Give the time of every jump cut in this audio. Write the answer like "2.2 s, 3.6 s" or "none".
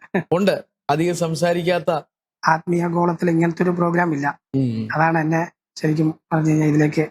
2.3 s